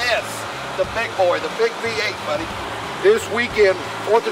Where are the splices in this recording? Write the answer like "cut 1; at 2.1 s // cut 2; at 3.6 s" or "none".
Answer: cut 1; at 2.7 s

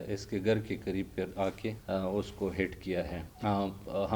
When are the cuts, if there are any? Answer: cut 1; at 1.8 s // cut 2; at 3.2 s

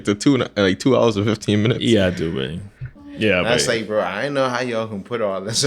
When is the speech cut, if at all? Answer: cut 1; at 2.8 s

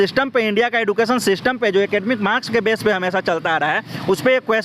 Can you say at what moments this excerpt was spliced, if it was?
none

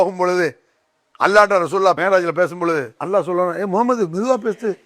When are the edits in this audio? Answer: cut 1; at 2.0 s // cut 2; at 2.9 s

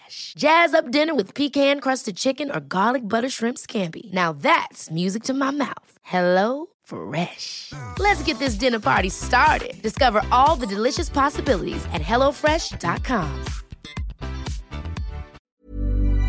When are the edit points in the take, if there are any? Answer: cut 1; at 15.4 s

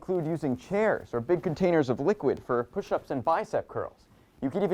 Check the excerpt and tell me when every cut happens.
none

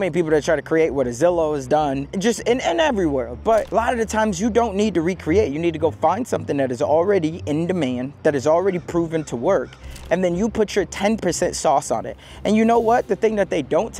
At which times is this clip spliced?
cut 1; at 2.1 s // cut 2; at 3.7 s

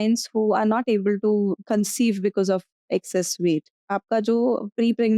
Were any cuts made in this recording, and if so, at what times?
cut 1; at 1.6 s // cut 2; at 3.8 s

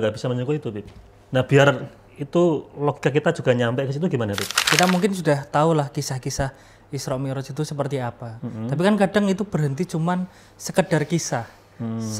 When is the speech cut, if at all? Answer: cut 1; at 4.7 s

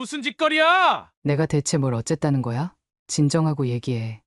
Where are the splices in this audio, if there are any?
cut 1; at 1.1 s

